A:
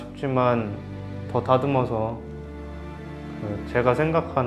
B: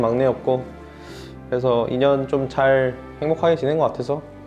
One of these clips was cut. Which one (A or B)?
B